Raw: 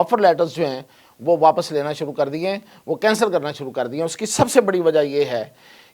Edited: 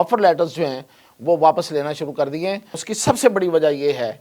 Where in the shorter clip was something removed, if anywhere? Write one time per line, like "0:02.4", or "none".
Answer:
0:02.8